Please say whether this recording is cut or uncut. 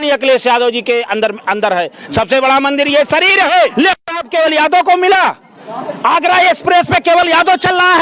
cut